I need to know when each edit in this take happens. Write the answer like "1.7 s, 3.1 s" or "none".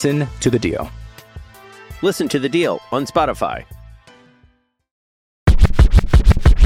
5.4 s